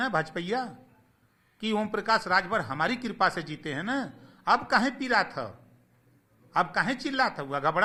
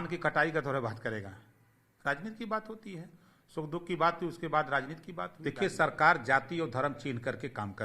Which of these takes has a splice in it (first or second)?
second